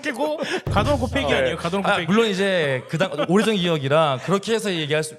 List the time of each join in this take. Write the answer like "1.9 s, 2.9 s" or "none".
none

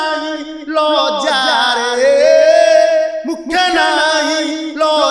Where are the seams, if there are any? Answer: none

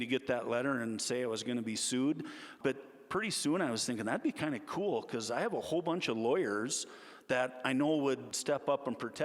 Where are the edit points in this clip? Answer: 2.5 s, 8.4 s

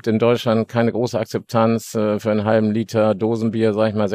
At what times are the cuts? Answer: none

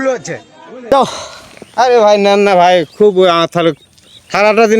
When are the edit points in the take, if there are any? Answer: 0.9 s

